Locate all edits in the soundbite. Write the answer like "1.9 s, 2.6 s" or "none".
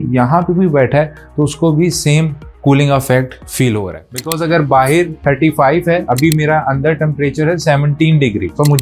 4.0 s